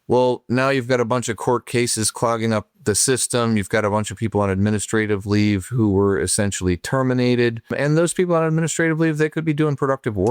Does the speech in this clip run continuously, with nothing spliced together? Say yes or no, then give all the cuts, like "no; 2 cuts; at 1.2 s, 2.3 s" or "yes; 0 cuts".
no; 2 cuts; at 2.7 s, 7.7 s